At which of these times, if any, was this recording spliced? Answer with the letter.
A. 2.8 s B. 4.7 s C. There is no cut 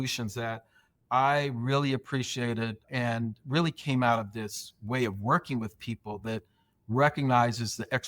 A